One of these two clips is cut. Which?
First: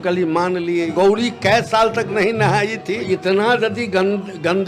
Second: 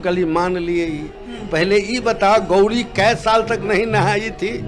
first; 2 cuts; at 0.9 s, 3.1 s

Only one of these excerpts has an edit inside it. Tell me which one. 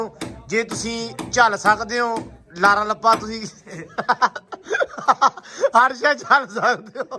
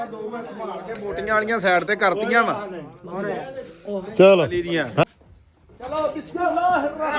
second; 1 cut; at 5.0 s

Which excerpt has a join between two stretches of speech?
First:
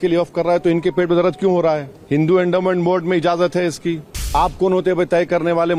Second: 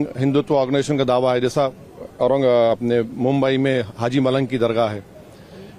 first; 2 cuts; at 1.9 s, 4.3 s

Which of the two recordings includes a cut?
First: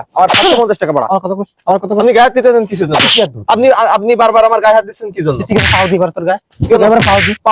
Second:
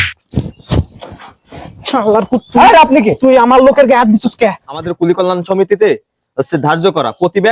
second; 1 cut; at 4.9 s

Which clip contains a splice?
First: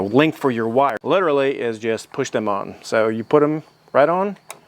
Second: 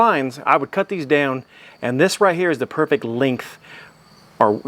first; 1 cut; at 0.9 s

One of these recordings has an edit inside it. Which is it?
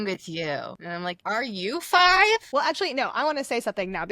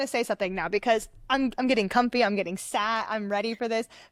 first; 2 cuts; at 1.0 s, 2.5 s

